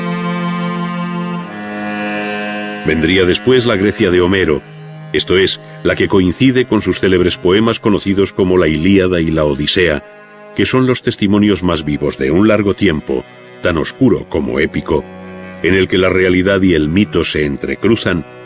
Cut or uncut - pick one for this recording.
cut